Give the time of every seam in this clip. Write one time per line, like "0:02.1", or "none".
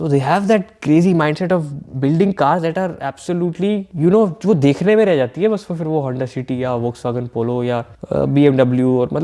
0:03.9
0:07.9